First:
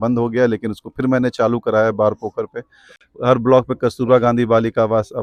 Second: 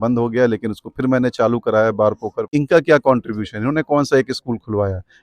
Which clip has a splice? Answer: second; 1 cut; at 2.5 s

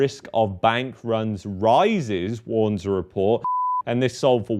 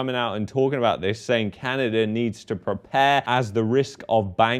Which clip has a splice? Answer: first; 1 cut; at 3.5 s

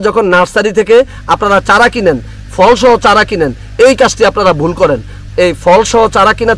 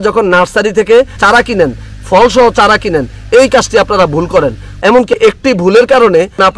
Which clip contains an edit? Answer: second; 2 cuts; at 1.2 s, 5.0 s

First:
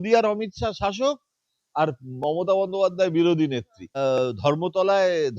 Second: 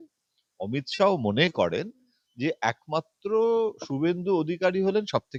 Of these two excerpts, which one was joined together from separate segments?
first; 1 cut; at 4.0 s

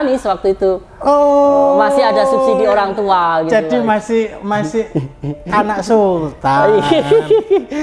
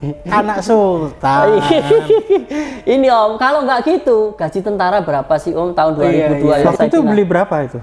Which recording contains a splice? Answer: second; 1 cut; at 6.6 s

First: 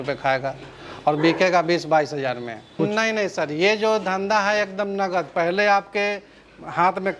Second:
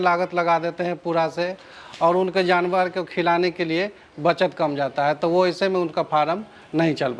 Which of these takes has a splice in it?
first; 1 cut; at 2.8 s

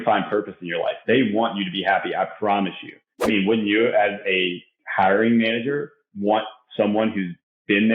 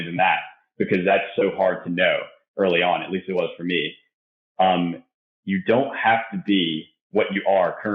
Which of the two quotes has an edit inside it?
first; 1 cut; at 3.1 s

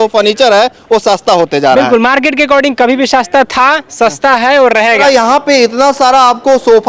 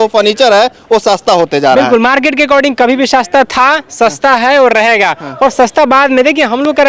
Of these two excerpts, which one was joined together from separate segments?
first; 1 cut; at 5.0 s

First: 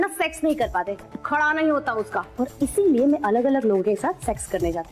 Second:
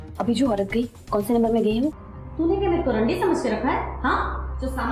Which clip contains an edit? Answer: second; 1 cut; at 2.0 s

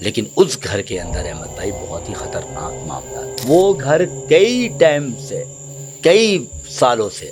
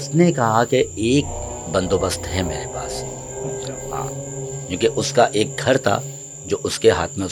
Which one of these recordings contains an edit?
first; 1 cut; at 3.4 s

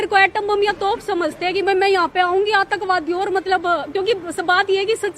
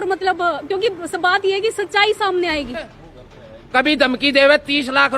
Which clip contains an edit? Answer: second; 1 cut; at 3.0 s

